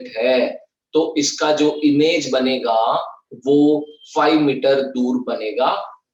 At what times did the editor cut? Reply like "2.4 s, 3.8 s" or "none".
none